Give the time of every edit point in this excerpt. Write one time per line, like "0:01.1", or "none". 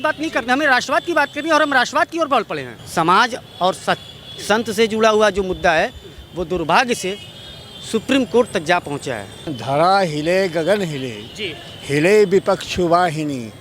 0:02.7
0:09.6